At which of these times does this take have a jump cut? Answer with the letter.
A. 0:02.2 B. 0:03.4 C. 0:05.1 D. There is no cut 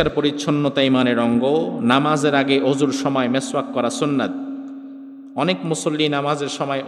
D